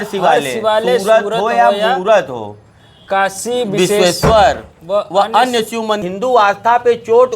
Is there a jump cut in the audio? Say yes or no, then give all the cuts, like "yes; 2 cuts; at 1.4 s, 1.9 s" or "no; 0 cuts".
yes; 1 cut; at 6.1 s